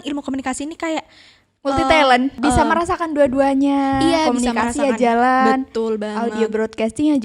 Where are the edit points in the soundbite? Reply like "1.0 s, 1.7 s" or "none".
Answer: 2.4 s